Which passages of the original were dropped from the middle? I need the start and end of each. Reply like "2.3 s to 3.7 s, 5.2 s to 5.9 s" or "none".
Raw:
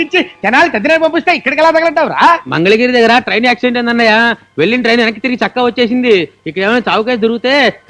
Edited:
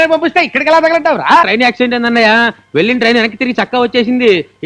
2.4 s to 3.3 s